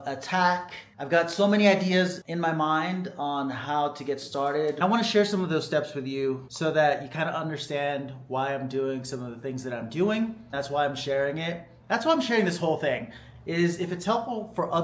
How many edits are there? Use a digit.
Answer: 2